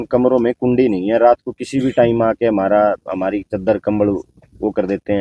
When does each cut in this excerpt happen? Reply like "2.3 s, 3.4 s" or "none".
none